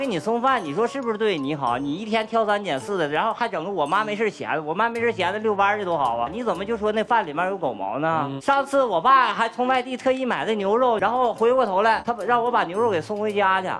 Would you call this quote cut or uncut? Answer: cut